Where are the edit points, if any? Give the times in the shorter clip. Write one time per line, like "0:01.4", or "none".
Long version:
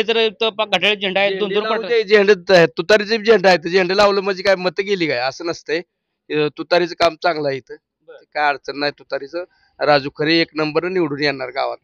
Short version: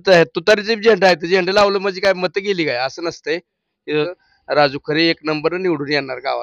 0:04.1